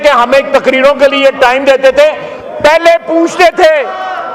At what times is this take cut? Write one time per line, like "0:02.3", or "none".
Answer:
none